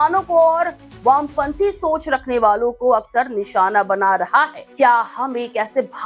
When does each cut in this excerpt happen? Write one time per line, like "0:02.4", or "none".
0:04.6